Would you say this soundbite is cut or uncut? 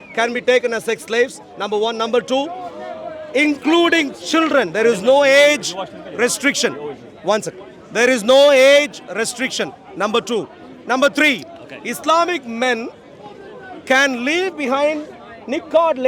uncut